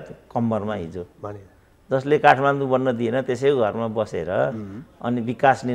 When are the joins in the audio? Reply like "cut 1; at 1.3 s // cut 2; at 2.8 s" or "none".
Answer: none